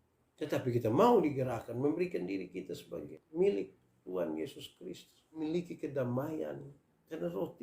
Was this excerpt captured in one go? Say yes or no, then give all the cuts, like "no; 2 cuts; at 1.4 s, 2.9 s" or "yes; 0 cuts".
no; 2 cuts; at 3.1 s, 5.4 s